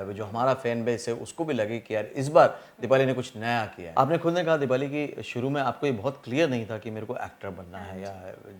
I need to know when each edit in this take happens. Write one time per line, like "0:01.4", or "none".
0:03.8